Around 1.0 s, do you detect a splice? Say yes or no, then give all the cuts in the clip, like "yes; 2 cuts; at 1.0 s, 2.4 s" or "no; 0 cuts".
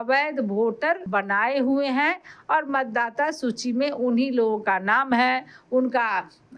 yes; 1 cut; at 1.0 s